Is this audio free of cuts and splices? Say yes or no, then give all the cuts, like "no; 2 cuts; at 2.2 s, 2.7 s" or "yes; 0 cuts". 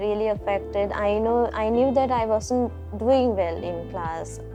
yes; 0 cuts